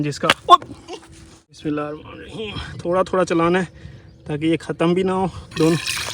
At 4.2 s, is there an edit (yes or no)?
no